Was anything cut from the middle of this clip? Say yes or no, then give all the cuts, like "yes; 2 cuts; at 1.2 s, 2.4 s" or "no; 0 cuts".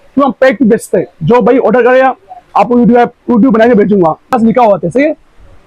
yes; 1 cut; at 4.3 s